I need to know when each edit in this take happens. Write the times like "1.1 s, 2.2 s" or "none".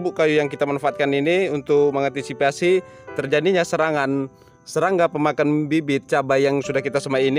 none